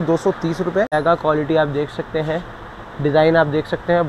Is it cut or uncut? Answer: cut